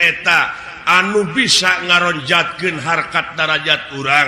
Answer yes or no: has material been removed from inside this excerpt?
no